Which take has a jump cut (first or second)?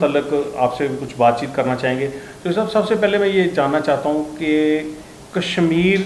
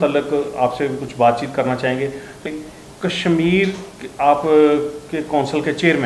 second